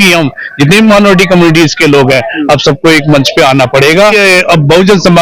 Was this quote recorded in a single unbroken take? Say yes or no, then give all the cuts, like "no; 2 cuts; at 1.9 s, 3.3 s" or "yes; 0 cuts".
no; 1 cut; at 4.1 s